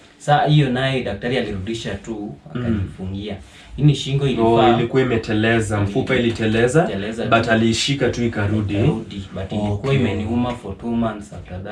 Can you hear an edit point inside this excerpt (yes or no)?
no